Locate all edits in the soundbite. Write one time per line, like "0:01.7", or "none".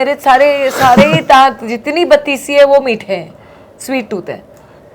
none